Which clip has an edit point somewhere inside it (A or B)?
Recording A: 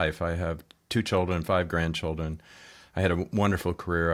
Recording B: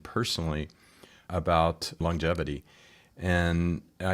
B